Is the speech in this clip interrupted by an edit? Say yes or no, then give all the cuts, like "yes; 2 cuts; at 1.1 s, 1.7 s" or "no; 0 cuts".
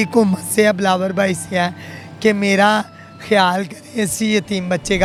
no; 0 cuts